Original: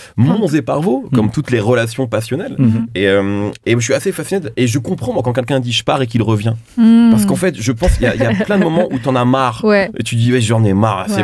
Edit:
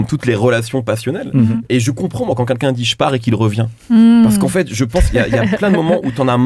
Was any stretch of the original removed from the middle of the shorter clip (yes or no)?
yes